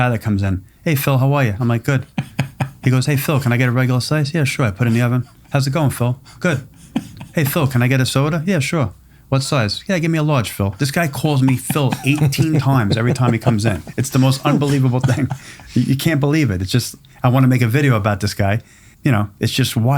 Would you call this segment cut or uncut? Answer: cut